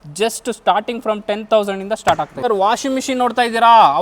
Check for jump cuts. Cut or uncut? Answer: cut